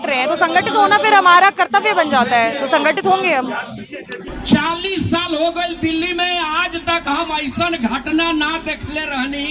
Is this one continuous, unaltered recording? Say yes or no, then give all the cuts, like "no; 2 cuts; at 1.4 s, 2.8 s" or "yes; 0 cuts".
yes; 0 cuts